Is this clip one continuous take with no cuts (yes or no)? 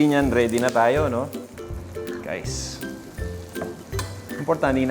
yes